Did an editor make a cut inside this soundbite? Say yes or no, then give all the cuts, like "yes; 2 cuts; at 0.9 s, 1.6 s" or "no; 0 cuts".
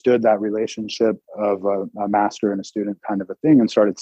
yes; 1 cut; at 1.3 s